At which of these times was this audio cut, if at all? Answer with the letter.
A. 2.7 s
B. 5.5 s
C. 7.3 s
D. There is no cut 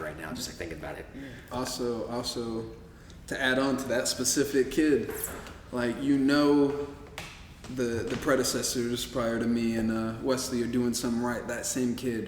D